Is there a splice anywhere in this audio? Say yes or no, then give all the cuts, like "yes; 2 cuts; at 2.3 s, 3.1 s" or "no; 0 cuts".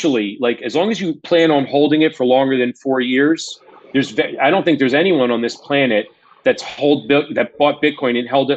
no; 0 cuts